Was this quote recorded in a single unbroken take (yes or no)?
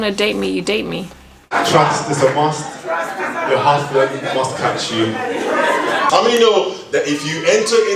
no